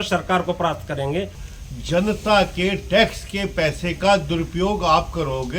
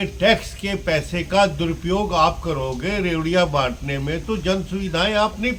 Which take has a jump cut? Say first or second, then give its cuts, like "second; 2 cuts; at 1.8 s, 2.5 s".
first; 1 cut; at 1.4 s